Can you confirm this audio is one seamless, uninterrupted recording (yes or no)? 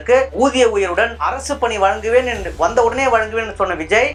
yes